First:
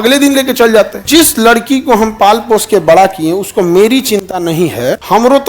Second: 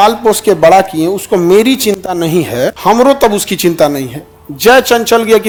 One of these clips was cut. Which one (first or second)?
first